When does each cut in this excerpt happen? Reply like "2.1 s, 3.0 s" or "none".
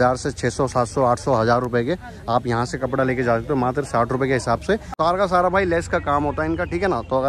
4.9 s